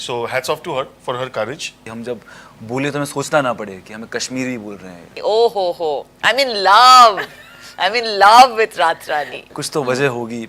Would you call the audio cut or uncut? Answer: cut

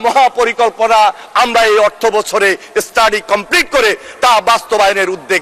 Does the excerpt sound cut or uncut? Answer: uncut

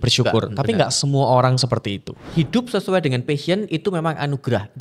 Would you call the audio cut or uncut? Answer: cut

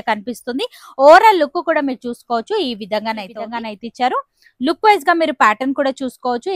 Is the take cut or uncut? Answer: cut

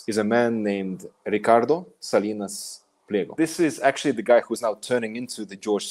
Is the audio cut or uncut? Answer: cut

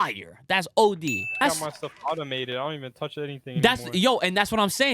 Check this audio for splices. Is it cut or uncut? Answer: cut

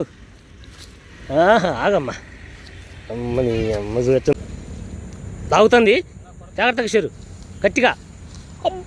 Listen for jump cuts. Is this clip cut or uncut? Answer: cut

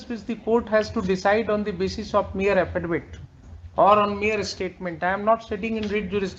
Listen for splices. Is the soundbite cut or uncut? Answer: uncut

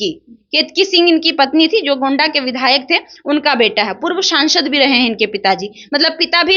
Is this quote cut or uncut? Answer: uncut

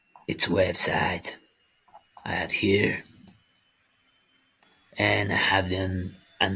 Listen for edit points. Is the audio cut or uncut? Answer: cut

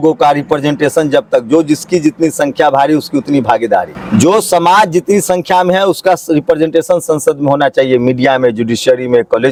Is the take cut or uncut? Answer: uncut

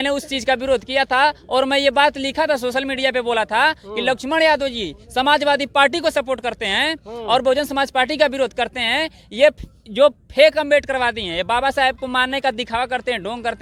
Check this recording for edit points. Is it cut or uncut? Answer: uncut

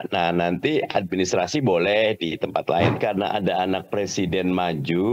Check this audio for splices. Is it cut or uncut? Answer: cut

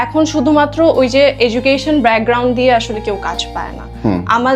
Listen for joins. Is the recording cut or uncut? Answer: uncut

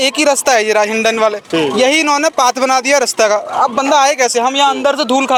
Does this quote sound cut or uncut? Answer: uncut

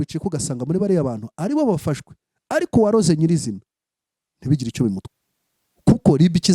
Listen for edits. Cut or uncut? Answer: cut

